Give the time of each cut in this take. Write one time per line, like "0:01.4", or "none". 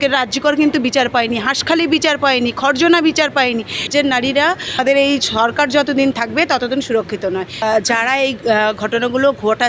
0:03.9
0:04.8
0:07.6